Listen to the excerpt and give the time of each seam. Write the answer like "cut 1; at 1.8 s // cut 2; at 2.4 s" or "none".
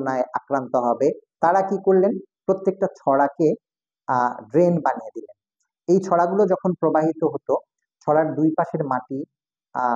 cut 1; at 1.3 s